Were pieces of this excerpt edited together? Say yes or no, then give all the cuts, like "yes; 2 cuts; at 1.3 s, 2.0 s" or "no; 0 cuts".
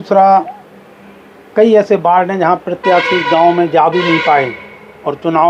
no; 0 cuts